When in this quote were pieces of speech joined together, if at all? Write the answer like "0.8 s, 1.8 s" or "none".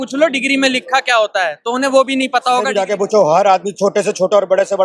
2.7 s